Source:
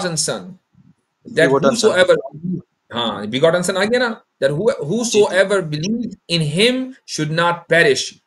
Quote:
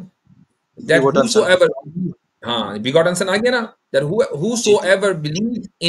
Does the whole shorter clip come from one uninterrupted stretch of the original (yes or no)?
yes